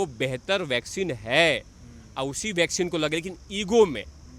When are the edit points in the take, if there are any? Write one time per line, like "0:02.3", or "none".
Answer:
none